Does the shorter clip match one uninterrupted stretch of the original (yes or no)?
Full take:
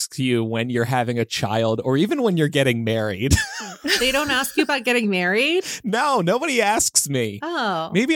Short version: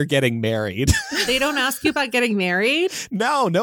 no